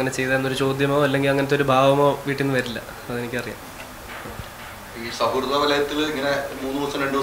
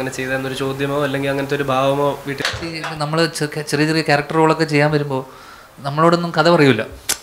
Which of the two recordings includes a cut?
second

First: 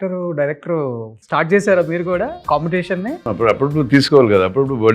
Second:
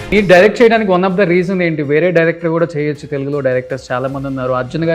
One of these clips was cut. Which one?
first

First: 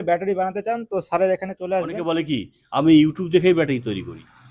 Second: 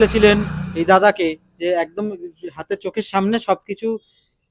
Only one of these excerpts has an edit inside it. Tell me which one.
first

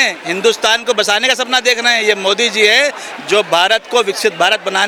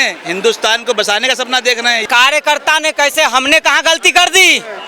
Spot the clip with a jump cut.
second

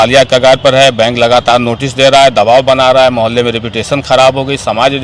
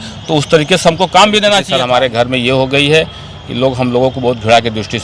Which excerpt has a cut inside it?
second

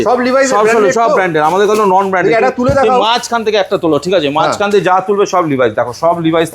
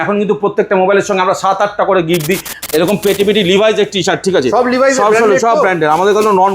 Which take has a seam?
second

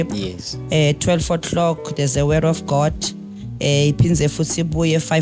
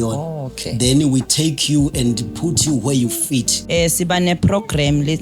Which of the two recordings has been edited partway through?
second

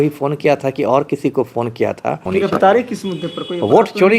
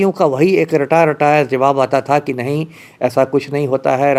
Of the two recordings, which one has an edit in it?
first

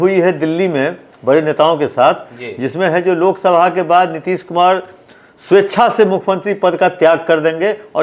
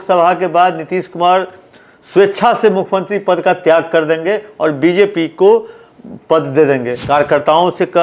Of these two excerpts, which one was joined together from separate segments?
second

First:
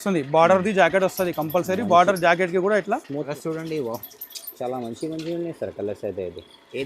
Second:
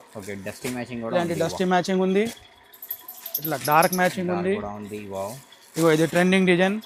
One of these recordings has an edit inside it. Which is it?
first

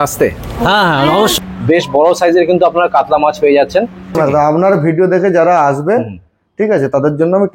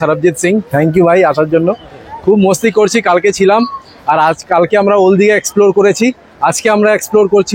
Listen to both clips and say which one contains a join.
first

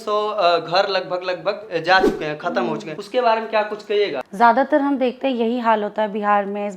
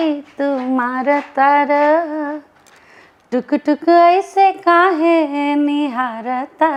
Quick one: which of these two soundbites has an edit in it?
first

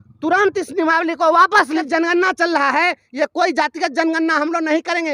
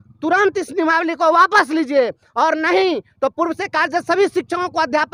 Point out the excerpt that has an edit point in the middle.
first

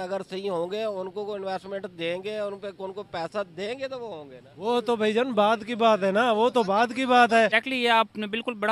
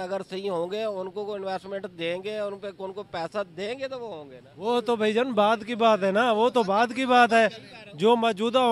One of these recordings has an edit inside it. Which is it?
first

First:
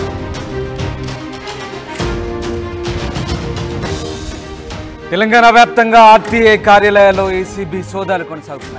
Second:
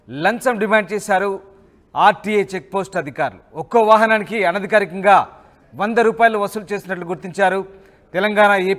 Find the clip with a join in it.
first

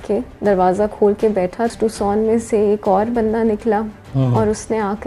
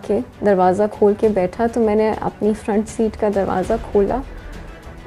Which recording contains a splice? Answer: first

